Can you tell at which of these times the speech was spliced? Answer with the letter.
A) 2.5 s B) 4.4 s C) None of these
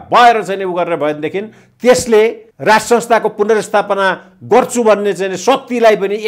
A